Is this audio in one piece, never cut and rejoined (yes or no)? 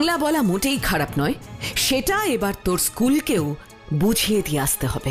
yes